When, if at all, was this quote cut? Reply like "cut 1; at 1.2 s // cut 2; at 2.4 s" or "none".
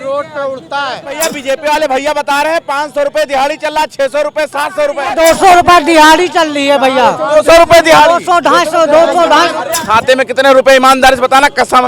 cut 1; at 1.1 s // cut 2; at 5.1 s // cut 3; at 9.6 s